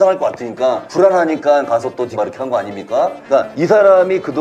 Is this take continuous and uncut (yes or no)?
no